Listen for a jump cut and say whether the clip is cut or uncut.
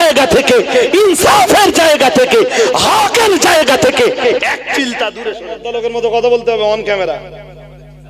cut